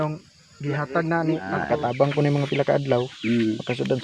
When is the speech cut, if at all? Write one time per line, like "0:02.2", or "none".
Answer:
0:01.5